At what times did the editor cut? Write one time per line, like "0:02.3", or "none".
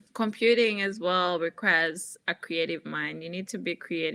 none

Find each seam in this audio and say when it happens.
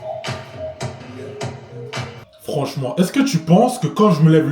0:01.0
0:02.4

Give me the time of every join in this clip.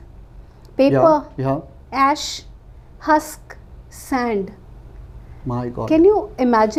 none

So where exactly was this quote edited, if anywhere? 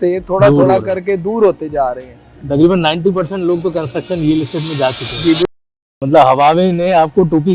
0:05.7

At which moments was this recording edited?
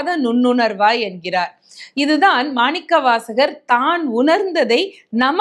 none

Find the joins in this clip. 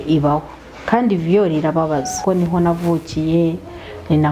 0:02.1

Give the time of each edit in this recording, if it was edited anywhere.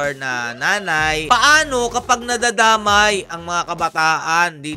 0:01.2

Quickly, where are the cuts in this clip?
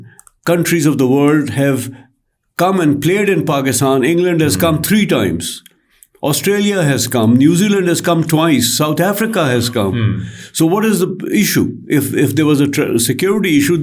none

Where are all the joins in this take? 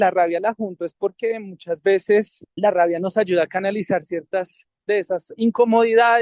0:02.4

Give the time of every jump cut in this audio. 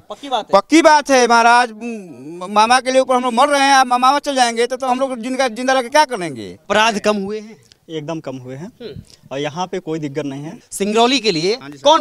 0:06.5
0:10.7

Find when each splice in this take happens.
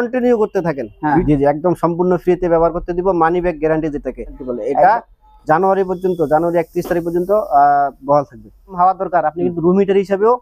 0:01.2
0:04.4
0:08.7

